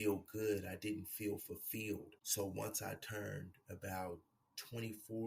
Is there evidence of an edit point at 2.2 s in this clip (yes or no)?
yes